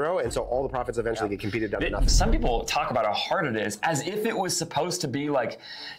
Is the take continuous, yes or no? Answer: no